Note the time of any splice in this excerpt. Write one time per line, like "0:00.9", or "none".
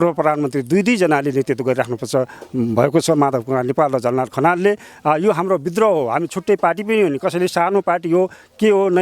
none